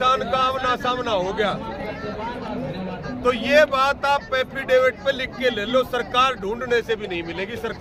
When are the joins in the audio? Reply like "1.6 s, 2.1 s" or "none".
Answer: none